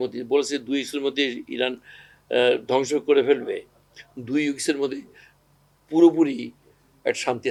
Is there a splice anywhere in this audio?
no; 0 cuts

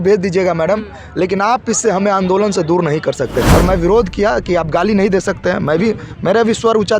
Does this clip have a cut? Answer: yes; 1 cut; at 3.5 s

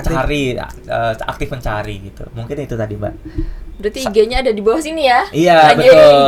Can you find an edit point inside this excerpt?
no; 0 cuts

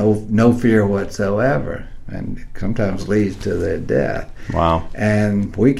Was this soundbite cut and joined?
no; 0 cuts

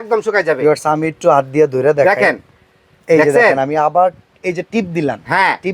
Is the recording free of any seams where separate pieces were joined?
yes; 0 cuts

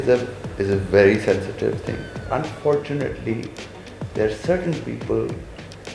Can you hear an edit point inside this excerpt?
yes; 1 cut; at 2.2 s

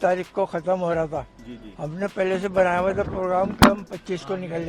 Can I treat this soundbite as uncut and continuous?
yes; 0 cuts

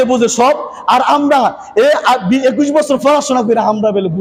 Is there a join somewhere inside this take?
no; 0 cuts

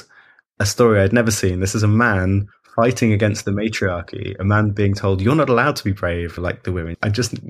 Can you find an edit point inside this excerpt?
yes; 1 cut; at 6.4 s

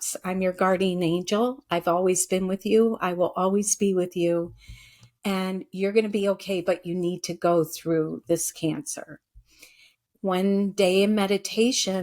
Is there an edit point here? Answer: yes; 1 cut; at 9.9 s

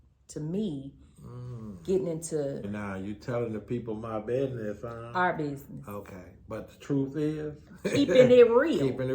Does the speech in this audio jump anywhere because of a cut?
yes; 1 cut; at 2.7 s

